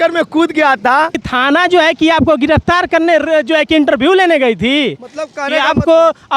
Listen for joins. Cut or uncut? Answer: cut